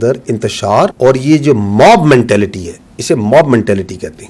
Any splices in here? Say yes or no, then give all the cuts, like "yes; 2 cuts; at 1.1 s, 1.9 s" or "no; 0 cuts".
yes; 1 cut; at 0.9 s